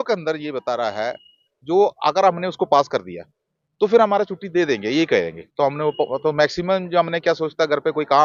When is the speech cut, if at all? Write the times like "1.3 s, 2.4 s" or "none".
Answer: none